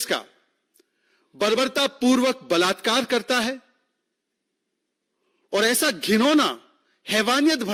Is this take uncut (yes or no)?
yes